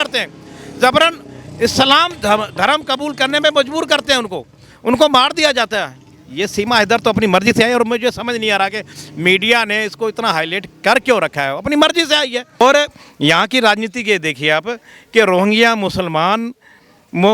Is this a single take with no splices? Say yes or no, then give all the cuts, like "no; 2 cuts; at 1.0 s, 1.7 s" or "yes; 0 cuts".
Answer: no; 1 cut; at 12.6 s